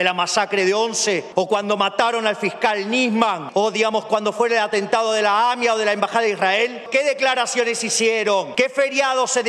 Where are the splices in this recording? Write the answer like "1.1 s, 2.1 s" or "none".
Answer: 1.3 s, 3.4 s, 6.9 s, 8.5 s